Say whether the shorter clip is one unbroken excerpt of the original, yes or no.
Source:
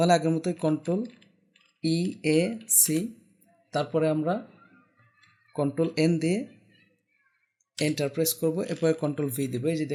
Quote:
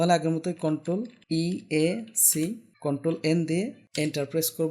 no